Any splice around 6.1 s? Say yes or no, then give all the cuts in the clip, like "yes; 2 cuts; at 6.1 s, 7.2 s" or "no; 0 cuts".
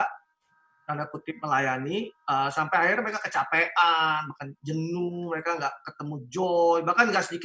no; 0 cuts